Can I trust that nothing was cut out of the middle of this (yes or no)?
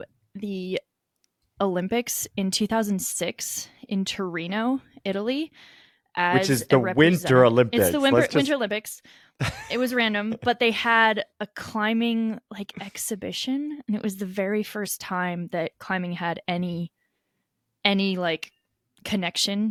yes